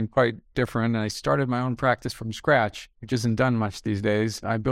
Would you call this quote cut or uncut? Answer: uncut